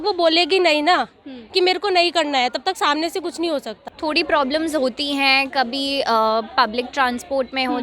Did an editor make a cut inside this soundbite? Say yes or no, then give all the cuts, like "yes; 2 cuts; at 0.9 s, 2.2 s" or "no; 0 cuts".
yes; 1 cut; at 3.9 s